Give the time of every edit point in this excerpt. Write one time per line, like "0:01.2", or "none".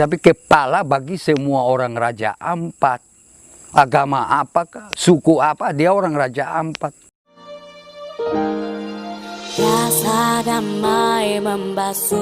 0:07.5